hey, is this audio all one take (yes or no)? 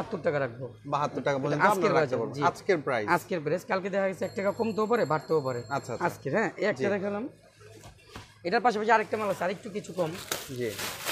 yes